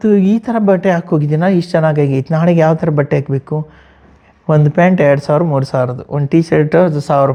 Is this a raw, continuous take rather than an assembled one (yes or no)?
yes